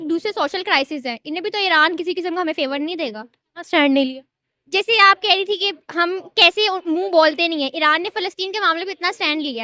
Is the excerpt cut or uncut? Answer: uncut